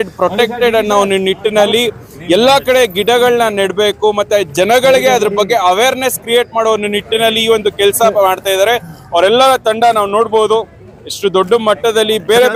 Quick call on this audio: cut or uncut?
uncut